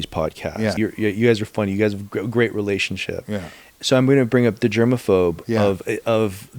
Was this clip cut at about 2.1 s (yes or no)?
no